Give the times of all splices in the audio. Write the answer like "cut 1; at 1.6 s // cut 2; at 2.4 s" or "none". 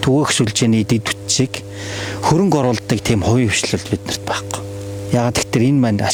none